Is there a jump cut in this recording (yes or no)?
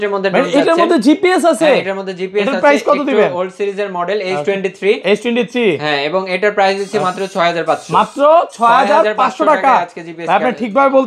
no